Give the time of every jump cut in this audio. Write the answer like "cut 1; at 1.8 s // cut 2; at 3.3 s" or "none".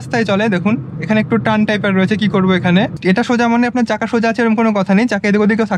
cut 1; at 3.0 s

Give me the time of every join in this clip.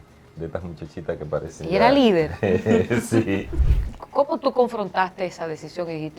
cut 1; at 3.6 s

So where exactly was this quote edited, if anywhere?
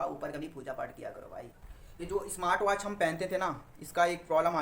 cut 1; at 1.6 s

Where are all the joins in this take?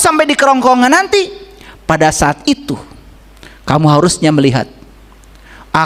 none

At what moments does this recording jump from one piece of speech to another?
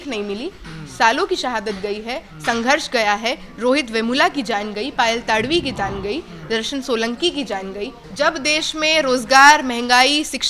cut 1; at 8.0 s

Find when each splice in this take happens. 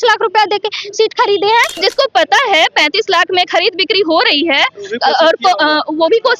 cut 1; at 1.8 s

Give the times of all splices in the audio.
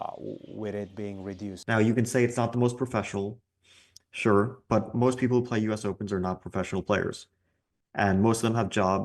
cut 1; at 1.5 s

